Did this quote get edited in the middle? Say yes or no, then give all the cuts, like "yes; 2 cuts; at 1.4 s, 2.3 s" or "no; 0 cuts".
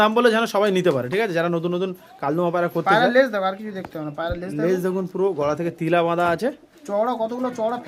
no; 0 cuts